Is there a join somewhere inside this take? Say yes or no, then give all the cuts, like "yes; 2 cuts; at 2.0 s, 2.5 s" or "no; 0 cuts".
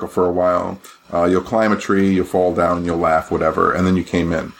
no; 0 cuts